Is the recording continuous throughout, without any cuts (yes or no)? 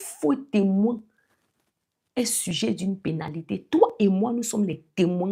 yes